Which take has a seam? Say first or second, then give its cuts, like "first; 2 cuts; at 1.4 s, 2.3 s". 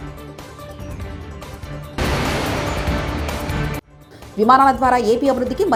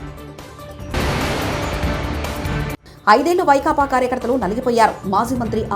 second; 2 cuts; at 0.9 s, 2.9 s